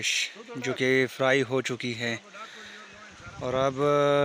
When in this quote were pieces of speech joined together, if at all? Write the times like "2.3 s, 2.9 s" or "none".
none